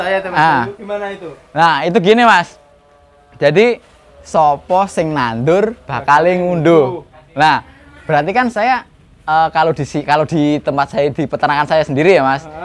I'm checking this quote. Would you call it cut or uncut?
uncut